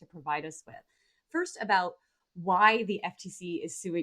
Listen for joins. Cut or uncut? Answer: cut